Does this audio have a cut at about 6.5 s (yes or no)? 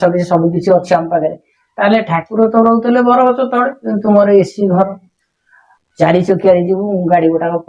no